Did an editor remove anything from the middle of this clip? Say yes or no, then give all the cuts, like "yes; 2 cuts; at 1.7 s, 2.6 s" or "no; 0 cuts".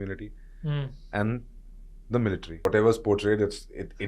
yes; 1 cut; at 2.6 s